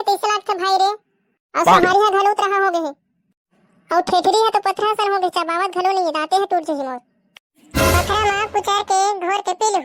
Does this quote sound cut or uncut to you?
uncut